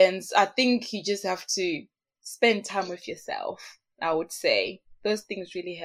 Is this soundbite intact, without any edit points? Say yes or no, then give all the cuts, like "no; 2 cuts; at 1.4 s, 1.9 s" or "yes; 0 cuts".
yes; 0 cuts